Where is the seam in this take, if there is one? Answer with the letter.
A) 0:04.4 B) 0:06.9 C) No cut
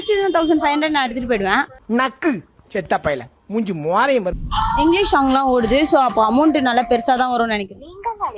A